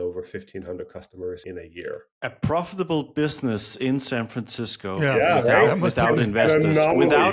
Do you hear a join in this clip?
yes; 1 cut; at 1.8 s

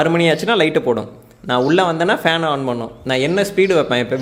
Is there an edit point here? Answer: no; 0 cuts

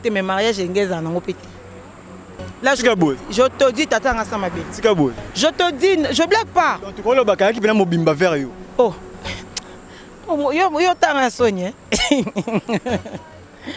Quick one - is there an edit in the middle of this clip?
no; 0 cuts

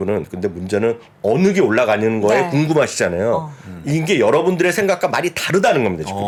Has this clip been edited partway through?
no; 0 cuts

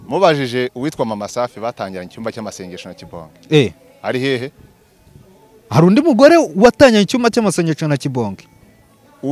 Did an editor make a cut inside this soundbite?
no; 0 cuts

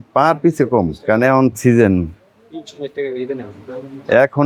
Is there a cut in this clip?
no; 0 cuts

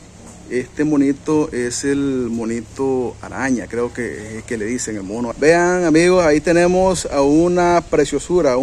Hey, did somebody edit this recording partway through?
yes; 1 cut; at 5.3 s

